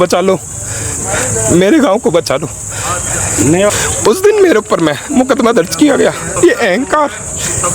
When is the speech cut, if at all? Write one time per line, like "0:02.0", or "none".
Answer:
0:03.7
0:06.3